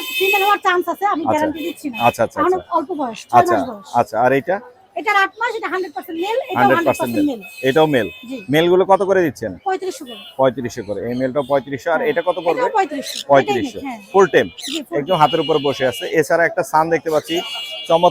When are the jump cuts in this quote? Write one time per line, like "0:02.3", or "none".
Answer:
none

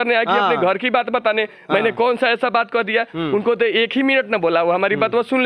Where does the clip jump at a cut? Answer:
none

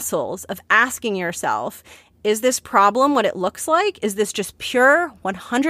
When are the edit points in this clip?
none

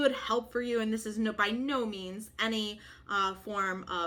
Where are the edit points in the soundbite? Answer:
none

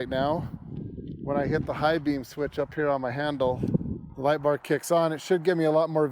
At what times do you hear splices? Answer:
0:04.0

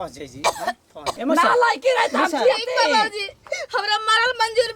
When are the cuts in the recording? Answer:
0:01.1

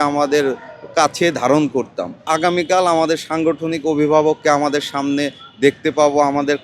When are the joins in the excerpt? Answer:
0:02.3

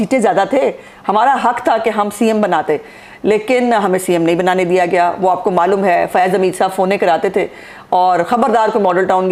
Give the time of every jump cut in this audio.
none

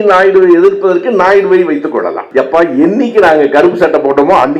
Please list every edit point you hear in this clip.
0:02.2

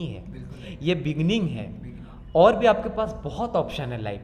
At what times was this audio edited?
none

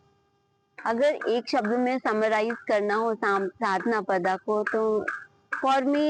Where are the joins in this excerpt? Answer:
none

